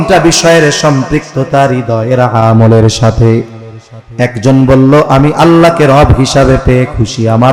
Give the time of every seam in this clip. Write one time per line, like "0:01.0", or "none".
none